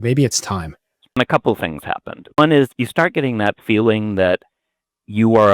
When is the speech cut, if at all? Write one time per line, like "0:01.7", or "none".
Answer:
0:01.2
0:02.4

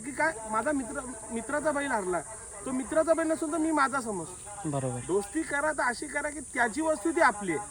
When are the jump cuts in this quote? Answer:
none

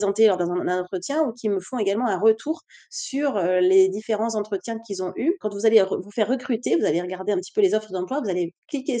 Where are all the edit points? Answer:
0:05.4

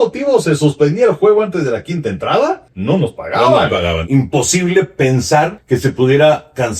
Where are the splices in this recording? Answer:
0:02.7
0:04.0
0:05.6

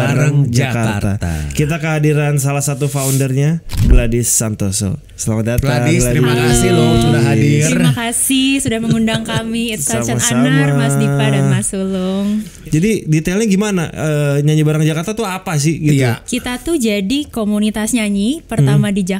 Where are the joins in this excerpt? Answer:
0:12.5

